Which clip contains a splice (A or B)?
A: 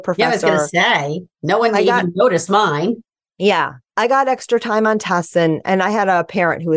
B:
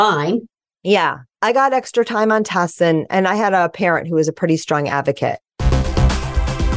B